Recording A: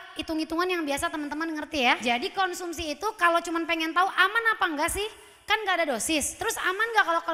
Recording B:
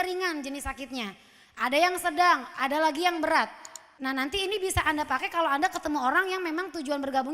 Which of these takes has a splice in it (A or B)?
B